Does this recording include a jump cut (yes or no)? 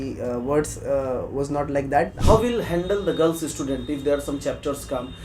yes